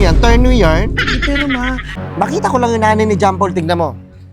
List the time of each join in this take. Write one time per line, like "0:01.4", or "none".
0:02.0